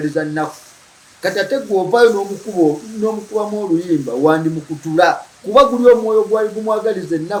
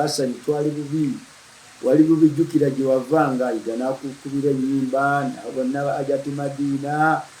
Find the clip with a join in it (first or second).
second